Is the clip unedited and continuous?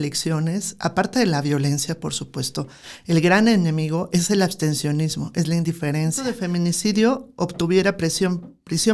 no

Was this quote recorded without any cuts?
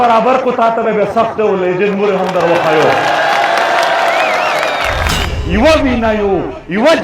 no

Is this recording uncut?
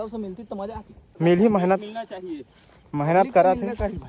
no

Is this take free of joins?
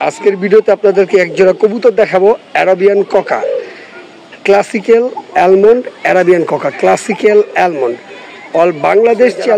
yes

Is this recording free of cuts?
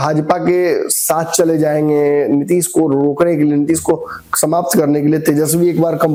yes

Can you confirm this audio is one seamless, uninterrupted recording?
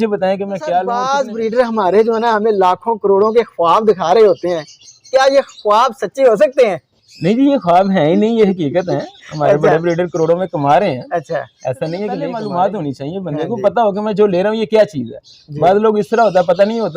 no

